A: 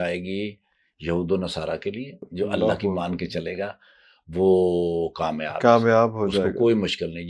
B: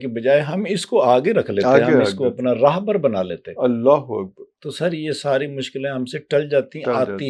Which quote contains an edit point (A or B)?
A